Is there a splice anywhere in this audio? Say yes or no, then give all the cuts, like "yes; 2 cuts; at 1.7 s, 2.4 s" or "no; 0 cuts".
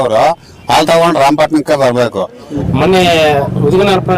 yes; 1 cut; at 2.6 s